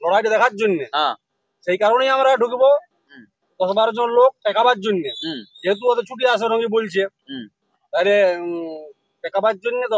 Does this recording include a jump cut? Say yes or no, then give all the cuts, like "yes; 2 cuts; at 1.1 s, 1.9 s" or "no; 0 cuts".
no; 0 cuts